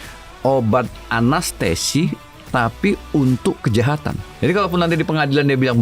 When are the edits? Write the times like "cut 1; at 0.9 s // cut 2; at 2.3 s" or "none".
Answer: cut 1; at 4.2 s